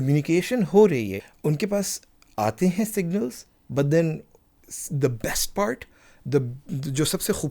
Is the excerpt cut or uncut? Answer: cut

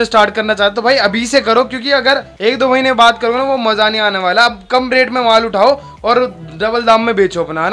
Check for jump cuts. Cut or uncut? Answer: uncut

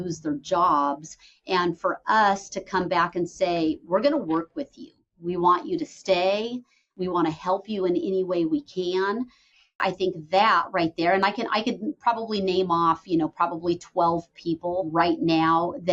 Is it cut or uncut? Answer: cut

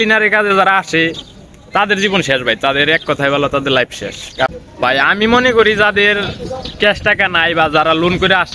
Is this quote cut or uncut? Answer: cut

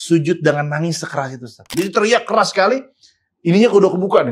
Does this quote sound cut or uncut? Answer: cut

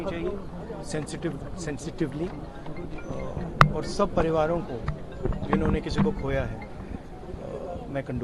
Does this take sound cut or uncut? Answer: uncut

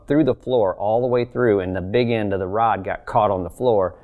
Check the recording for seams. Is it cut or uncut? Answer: uncut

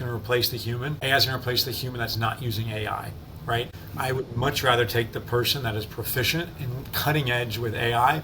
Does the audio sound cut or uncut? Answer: cut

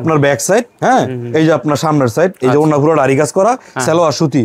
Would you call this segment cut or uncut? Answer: uncut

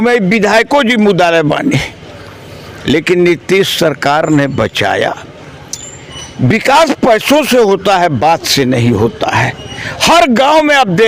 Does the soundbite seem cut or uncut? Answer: uncut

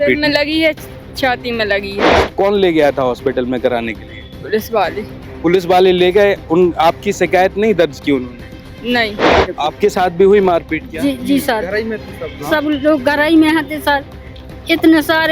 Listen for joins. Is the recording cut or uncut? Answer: cut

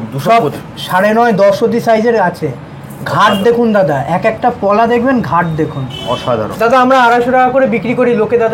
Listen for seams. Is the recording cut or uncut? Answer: cut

